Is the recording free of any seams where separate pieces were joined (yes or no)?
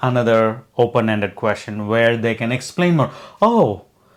yes